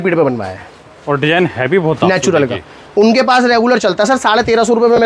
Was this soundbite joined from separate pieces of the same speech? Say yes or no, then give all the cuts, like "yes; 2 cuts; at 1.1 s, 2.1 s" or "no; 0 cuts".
no; 0 cuts